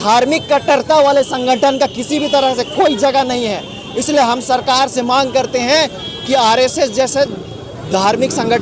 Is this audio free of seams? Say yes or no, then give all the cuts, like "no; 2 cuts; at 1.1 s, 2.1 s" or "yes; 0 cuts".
yes; 0 cuts